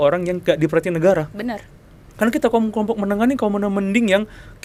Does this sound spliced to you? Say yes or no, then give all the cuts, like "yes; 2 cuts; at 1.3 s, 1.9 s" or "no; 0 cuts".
no; 0 cuts